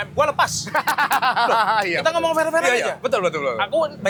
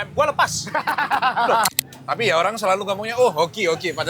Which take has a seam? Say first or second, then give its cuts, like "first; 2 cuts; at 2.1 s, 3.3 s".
second; 1 cut; at 1.7 s